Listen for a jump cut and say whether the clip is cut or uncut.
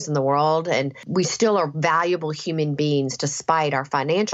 cut